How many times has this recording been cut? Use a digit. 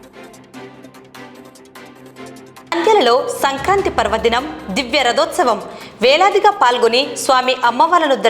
2